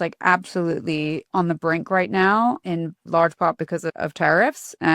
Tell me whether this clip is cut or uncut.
cut